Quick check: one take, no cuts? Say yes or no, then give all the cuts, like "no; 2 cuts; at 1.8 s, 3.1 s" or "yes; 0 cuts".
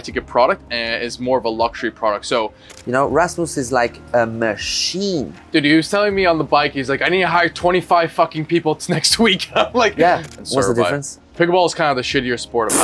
no; 4 cuts; at 2.6 s, 5.4 s, 10.3 s, 11.2 s